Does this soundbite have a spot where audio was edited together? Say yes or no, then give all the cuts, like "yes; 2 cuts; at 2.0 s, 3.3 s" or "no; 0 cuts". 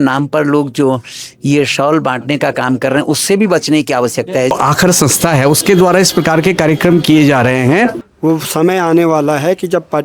yes; 2 cuts; at 4.5 s, 8.1 s